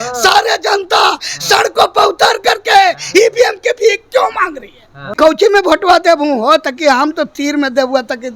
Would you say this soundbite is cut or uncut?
cut